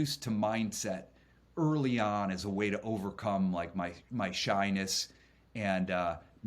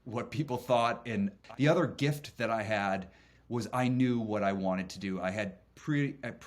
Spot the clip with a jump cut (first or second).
second